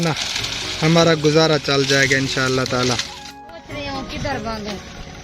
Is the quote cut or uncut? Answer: cut